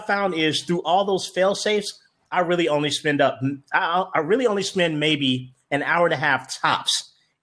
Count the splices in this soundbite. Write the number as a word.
zero